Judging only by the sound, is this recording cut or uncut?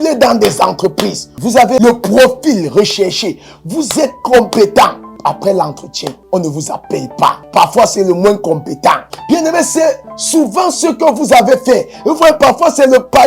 cut